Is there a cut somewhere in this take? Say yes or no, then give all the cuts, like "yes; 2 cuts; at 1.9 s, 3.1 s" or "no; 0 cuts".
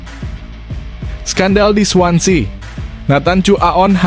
yes; 1 cut; at 1.3 s